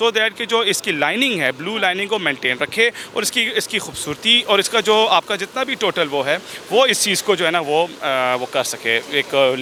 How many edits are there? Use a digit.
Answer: 0